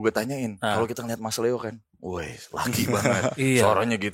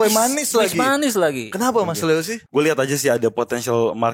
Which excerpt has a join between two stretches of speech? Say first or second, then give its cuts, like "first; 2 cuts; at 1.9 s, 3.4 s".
second; 1 cut; at 2.4 s